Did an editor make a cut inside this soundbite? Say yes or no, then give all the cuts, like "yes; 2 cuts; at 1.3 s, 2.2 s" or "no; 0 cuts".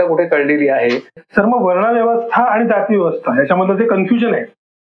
yes; 1 cut; at 1.2 s